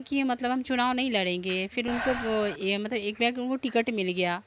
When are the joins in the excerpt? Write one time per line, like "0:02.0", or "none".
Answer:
none